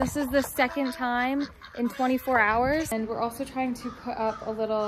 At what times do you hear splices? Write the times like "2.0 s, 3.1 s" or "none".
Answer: 2.9 s